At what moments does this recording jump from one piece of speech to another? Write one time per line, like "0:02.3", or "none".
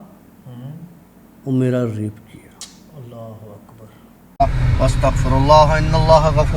0:04.4